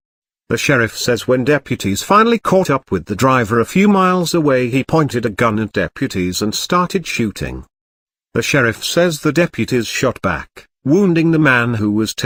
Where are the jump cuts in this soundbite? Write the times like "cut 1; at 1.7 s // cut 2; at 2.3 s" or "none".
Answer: none